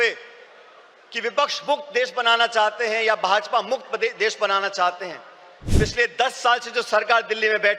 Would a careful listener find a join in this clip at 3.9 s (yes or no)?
no